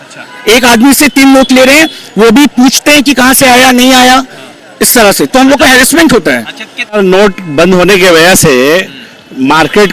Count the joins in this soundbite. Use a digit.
1